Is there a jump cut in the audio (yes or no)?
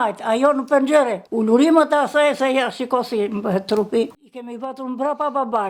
yes